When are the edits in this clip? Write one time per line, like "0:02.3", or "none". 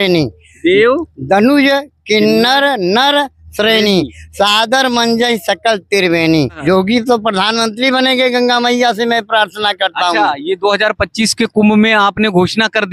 0:06.6